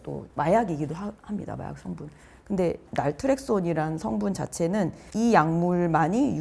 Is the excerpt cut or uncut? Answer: cut